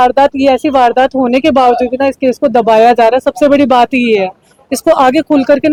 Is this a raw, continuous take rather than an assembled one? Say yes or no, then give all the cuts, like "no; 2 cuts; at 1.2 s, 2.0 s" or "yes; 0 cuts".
yes; 0 cuts